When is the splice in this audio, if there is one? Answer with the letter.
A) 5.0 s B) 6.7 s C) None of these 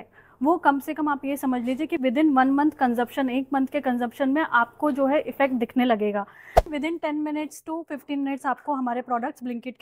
B